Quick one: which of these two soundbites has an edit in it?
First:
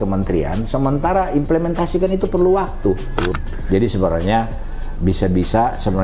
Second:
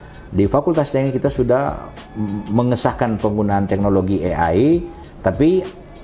first; 1 cut; at 3.4 s

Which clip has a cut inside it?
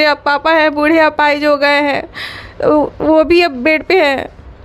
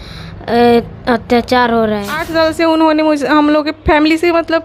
second; 1 cut; at 2.2 s

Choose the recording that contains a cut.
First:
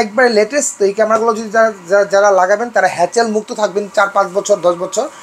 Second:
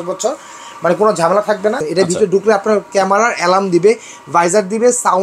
second; 1 cut; at 1.8 s

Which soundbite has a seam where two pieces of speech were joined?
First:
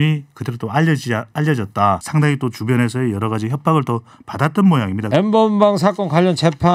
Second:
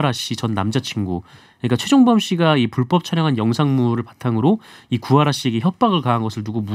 first; 2 cuts; at 2.0 s, 5.0 s

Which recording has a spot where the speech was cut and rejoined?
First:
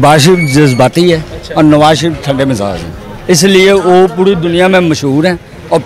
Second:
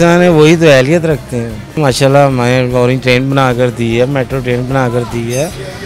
second; 1 cut; at 1.8 s

